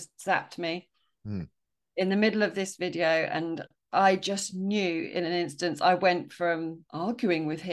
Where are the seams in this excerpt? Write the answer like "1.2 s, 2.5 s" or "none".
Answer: 6.8 s